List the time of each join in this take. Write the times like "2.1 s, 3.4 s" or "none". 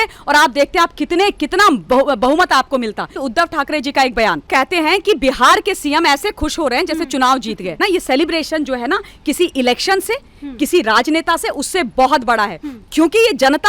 3.2 s, 4.5 s, 7.8 s